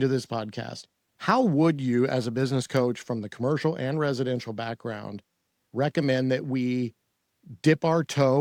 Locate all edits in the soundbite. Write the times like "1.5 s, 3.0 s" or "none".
none